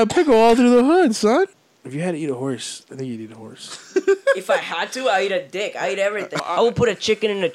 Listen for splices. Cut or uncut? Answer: cut